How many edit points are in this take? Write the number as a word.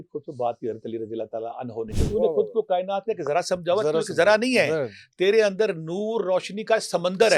one